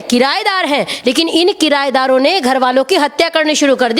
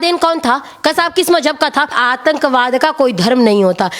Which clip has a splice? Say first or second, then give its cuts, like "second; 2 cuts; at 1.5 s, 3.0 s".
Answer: second; 1 cut; at 2.0 s